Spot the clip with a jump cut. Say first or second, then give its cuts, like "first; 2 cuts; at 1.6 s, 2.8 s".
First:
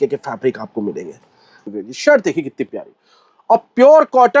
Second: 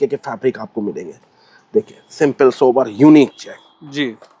first; 1 cut; at 1.6 s